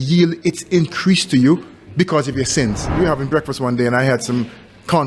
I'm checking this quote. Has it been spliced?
yes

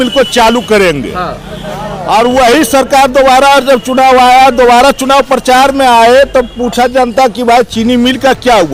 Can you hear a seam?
no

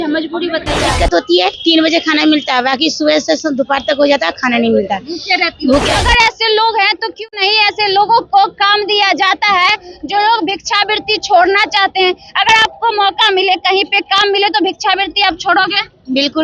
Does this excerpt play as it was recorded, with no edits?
no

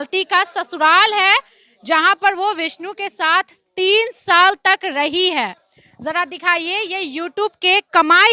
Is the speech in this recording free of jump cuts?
yes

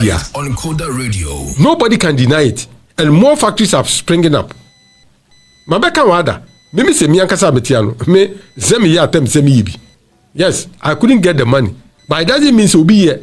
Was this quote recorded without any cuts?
yes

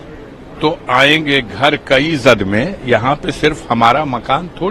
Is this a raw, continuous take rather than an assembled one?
yes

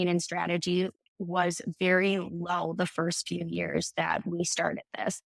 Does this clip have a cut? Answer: no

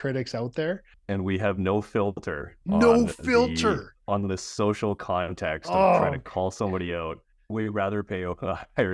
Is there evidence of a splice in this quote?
yes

